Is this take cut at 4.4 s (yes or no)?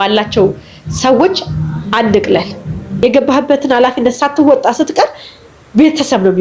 no